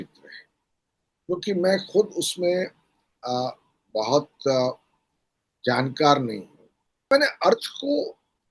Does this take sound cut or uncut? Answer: cut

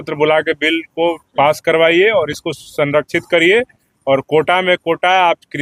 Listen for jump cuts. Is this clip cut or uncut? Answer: uncut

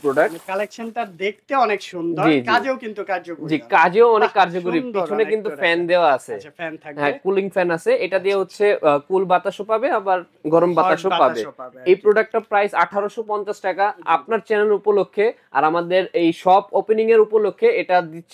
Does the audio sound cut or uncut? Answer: uncut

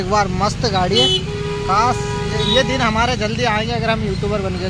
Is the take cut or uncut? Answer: uncut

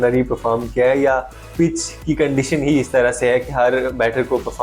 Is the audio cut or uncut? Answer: uncut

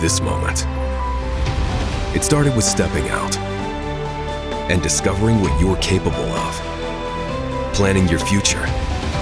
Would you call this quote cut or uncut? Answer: uncut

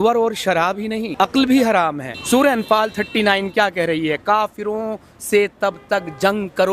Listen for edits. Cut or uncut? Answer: cut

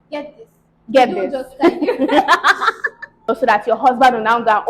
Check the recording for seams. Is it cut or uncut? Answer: cut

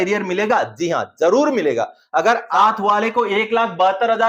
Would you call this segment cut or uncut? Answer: cut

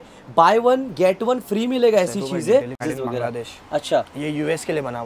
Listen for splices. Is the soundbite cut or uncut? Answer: cut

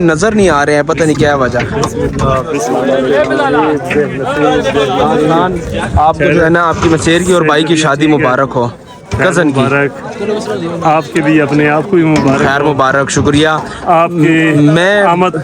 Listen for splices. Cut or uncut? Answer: uncut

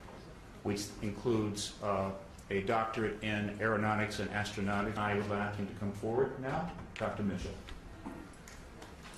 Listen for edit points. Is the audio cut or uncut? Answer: uncut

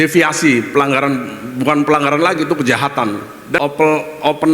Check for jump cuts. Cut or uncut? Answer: cut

